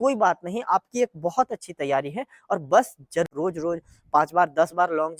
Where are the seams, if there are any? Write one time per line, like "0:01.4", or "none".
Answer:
0:03.3